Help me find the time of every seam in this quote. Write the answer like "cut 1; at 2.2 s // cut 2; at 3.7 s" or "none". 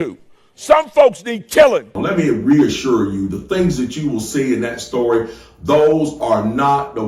cut 1; at 1.9 s